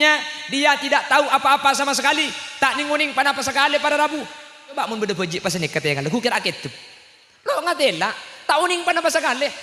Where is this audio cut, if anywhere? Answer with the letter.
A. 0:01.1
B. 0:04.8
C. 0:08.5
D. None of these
B